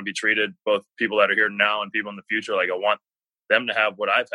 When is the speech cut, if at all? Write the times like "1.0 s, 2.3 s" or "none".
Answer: none